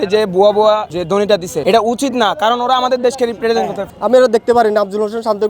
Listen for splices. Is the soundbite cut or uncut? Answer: cut